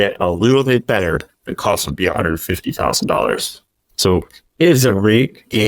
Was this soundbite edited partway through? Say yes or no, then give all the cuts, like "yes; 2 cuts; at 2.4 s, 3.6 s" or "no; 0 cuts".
no; 0 cuts